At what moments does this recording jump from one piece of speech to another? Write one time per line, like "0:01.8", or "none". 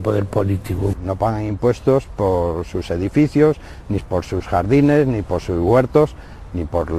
0:02.6